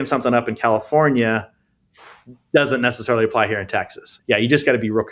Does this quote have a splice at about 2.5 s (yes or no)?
no